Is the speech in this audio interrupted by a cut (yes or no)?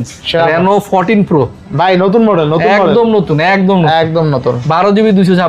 no